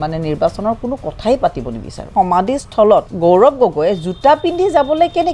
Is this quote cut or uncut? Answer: cut